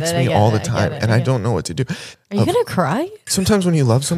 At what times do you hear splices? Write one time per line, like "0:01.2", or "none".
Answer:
0:02.1
0:03.2